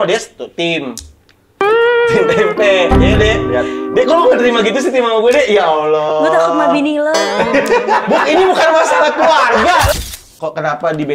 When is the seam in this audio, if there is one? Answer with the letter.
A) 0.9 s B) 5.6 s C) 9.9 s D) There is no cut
C